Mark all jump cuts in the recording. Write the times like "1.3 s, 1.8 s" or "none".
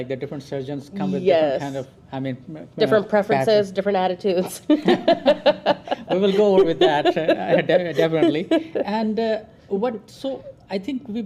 none

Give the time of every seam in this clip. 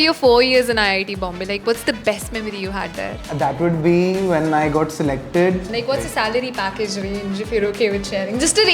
5.6 s

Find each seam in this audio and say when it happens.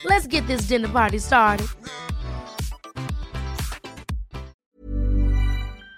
4.6 s

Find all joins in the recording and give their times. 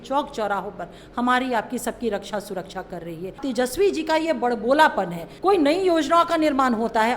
3.4 s, 5.2 s

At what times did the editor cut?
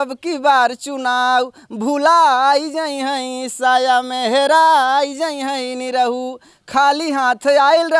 none

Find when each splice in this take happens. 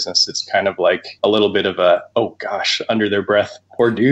1.1 s, 2.1 s

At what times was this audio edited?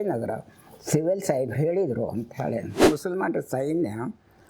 2.8 s

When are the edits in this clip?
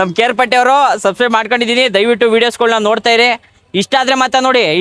none

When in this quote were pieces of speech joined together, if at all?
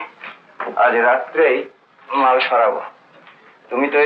none

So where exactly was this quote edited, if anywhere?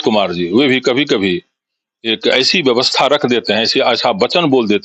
none

